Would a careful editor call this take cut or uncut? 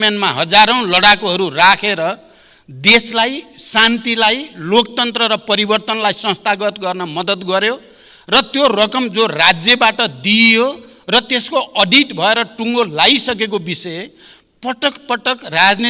uncut